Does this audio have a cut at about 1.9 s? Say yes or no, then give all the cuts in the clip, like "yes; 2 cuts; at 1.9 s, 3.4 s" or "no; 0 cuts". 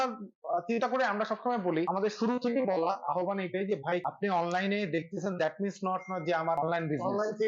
yes; 3 cuts; at 1.9 s, 4.1 s, 6.6 s